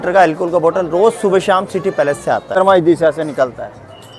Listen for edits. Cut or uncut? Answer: cut